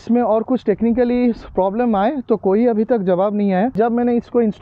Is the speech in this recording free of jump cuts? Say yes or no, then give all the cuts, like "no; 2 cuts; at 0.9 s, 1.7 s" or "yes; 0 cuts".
no; 1 cut; at 3.7 s